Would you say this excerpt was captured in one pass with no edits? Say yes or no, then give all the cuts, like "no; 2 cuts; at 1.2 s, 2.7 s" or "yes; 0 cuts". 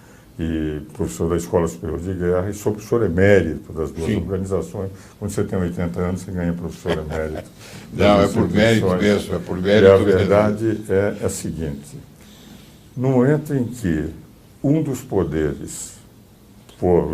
no; 1 cut; at 14.4 s